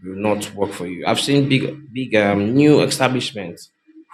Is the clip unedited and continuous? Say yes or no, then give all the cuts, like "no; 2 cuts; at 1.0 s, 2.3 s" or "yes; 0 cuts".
yes; 0 cuts